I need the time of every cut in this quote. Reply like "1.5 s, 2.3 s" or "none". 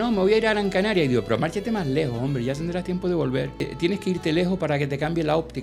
3.7 s